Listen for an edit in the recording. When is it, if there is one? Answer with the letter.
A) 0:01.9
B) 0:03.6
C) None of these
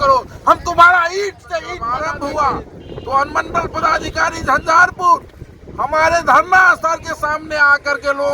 A